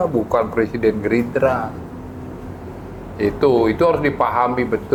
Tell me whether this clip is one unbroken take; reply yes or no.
yes